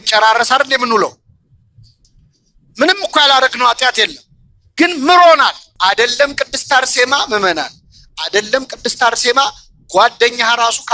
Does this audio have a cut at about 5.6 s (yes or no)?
yes